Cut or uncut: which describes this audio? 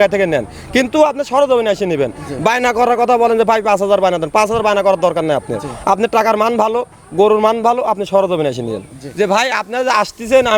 cut